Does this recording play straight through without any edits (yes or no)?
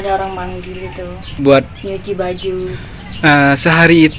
no